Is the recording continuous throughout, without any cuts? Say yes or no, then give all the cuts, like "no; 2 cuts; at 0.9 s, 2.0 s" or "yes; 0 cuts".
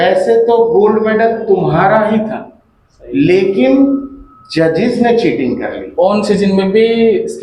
no; 1 cut; at 5.8 s